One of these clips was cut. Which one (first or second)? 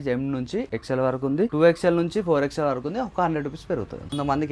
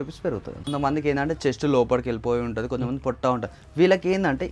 first